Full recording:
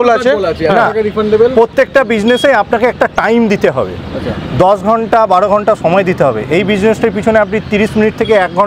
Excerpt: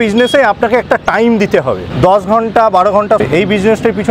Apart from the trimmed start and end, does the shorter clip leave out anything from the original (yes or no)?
yes